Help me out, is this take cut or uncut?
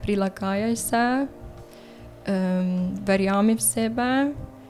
uncut